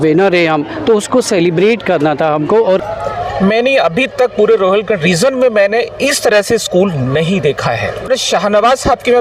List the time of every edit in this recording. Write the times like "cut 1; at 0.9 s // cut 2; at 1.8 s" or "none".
cut 1; at 2.8 s // cut 2; at 8.1 s

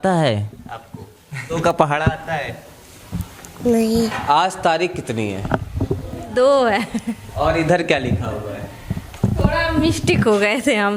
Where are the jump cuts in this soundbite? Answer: cut 1; at 1.5 s // cut 2; at 4.1 s // cut 3; at 6.2 s

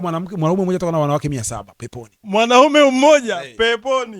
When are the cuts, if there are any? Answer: cut 1; at 2.1 s

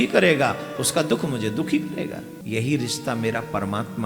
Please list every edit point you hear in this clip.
cut 1; at 2.4 s

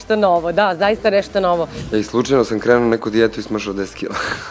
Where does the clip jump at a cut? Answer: cut 1; at 1.7 s

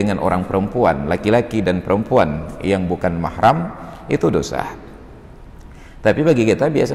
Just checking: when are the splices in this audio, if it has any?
none

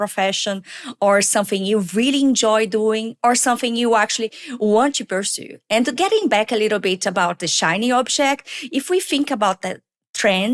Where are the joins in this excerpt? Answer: none

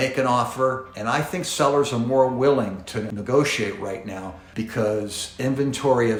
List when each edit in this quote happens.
none

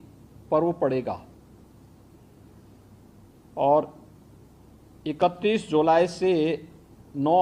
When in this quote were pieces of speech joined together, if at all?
none

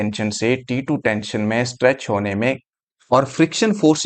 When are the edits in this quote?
cut 1; at 2.7 s

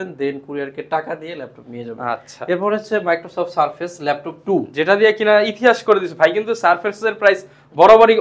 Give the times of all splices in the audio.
none

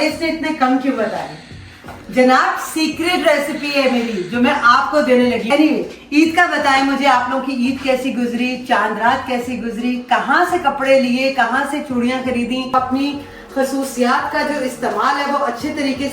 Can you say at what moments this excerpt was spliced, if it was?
cut 1; at 5.5 s // cut 2; at 12.7 s

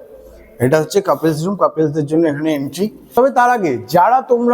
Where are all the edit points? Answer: cut 1; at 2.9 s

